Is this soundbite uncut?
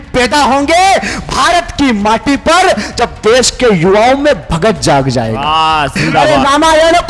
no; 1 cut; at 6.1 s

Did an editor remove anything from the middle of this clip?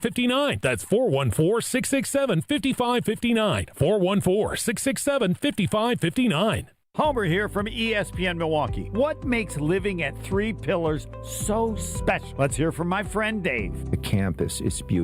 yes; 1 cut; at 6.8 s

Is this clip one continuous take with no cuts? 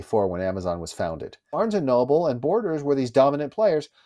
no; 1 cut; at 1.6 s

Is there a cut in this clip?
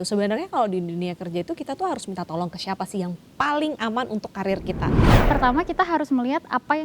yes; 1 cut; at 5.1 s

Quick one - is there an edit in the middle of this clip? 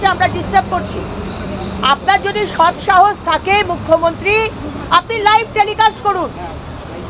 no; 0 cuts

